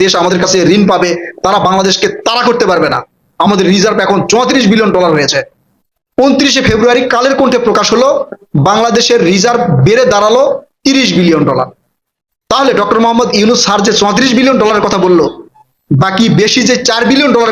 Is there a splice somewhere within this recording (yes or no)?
no